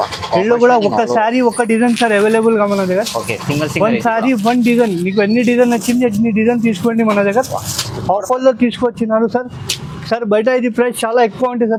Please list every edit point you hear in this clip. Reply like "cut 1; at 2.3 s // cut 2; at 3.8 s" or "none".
none